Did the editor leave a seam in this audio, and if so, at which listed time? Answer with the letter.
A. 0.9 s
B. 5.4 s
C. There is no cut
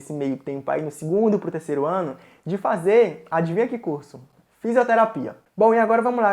B